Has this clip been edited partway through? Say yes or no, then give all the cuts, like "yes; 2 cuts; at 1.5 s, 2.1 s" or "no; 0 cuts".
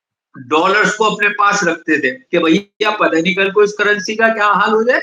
yes; 1 cut; at 2.2 s